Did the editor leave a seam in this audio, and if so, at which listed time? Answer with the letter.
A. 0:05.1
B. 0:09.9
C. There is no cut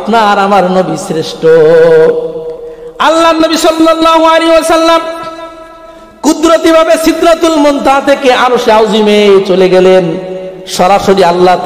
C